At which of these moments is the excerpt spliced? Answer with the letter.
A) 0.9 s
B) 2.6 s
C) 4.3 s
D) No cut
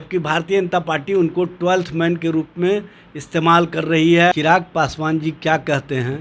C